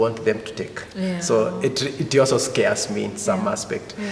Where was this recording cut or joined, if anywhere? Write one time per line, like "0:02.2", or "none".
none

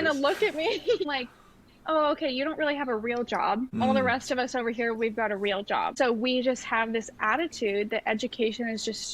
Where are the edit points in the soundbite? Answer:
0:01.1
0:03.9
0:05.9

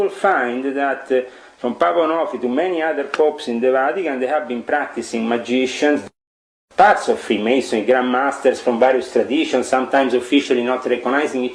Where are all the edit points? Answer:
0:06.0

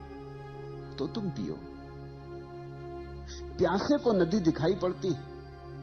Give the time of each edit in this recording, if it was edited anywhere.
0:01.6
0:03.6

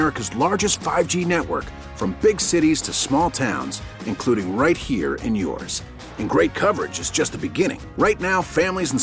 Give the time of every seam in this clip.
none

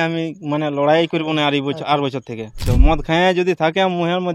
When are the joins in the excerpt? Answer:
0:02.7

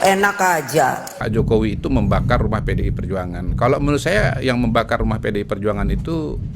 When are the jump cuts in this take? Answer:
0:01.1

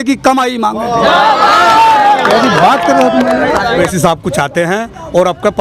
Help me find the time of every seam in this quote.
0:03.9

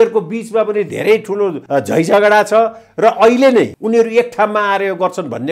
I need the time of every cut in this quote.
0:01.6
0:03.8

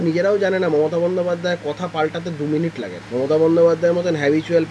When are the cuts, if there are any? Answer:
0:03.0

